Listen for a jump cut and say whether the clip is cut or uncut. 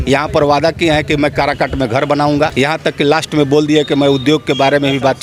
cut